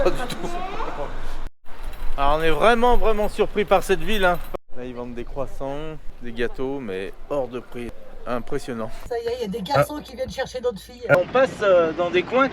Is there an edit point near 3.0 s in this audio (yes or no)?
no